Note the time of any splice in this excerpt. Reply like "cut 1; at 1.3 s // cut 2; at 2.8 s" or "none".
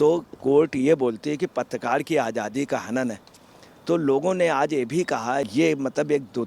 cut 1; at 5.5 s